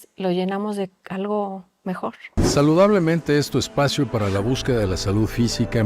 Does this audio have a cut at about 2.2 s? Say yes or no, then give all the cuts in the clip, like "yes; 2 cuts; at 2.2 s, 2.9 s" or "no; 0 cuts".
yes; 1 cut; at 2.2 s